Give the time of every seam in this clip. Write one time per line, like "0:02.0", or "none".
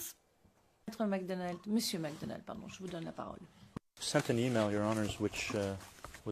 0:04.9